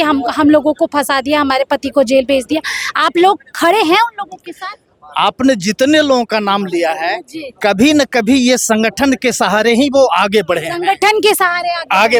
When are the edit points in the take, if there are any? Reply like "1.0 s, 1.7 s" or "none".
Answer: none

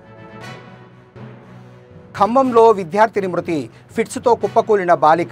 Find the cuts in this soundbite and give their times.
1.2 s

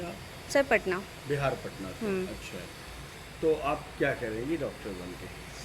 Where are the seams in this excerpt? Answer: none

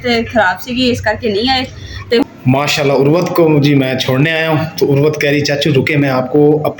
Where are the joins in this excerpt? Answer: 2.2 s

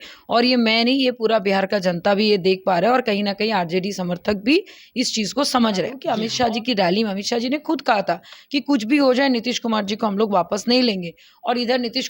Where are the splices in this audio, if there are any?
6.0 s

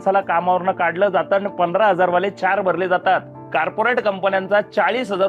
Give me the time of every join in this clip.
3.4 s

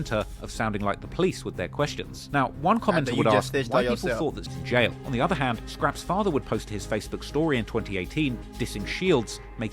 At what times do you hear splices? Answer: 4.5 s

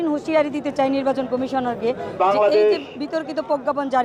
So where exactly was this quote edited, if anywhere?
none

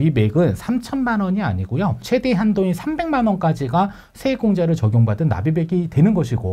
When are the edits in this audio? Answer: 2.0 s

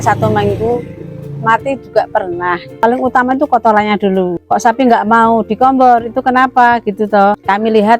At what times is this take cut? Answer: 2.8 s

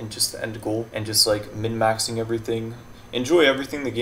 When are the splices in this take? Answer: 0.9 s

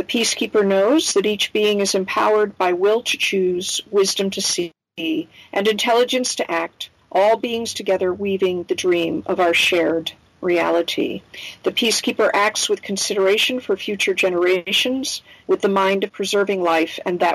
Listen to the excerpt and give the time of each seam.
15.0 s, 16.1 s

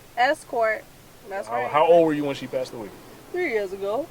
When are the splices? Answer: 1.6 s

